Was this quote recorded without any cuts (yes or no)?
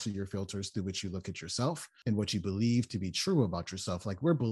no